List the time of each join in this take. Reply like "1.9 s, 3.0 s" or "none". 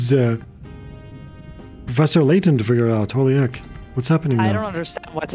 none